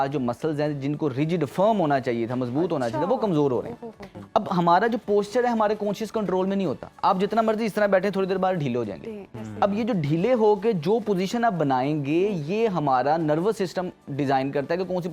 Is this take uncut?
yes; 0 cuts

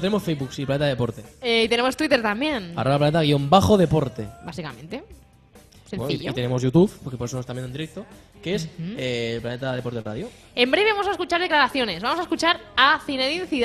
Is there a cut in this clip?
yes; 1 cut; at 1.9 s

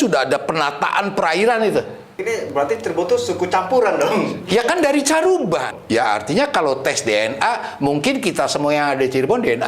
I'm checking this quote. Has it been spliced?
yes; 2 cuts; at 2.2 s, 5.7 s

